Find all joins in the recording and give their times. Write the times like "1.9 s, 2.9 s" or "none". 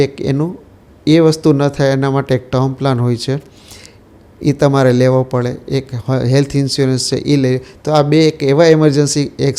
none